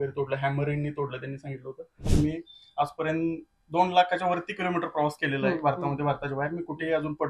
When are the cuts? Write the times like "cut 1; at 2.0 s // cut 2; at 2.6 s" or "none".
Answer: cut 1; at 2.0 s